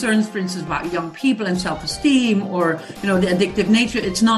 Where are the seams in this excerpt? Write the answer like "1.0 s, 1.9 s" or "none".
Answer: none